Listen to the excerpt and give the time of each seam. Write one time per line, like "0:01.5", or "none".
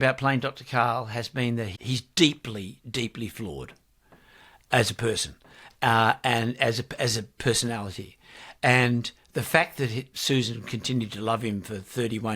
0:01.7